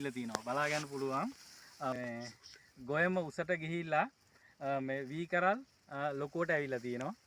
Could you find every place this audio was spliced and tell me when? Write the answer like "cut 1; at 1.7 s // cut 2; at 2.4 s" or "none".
cut 1; at 1.9 s